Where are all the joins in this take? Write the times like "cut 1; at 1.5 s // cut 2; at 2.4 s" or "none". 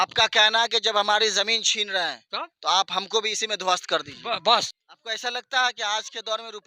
cut 1; at 4.7 s